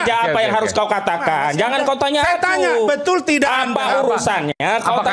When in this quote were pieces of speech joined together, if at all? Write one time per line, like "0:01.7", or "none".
none